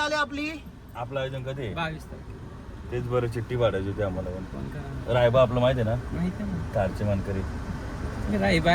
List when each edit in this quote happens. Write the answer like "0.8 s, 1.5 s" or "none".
none